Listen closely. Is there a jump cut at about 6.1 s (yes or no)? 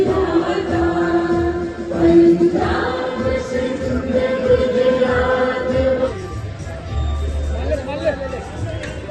yes